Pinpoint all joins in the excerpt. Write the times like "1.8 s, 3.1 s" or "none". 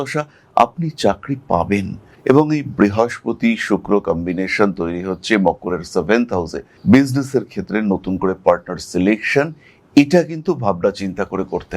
2.1 s